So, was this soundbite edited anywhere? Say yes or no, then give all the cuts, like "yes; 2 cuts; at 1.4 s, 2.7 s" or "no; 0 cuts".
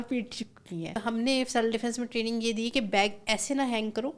yes; 1 cut; at 1.0 s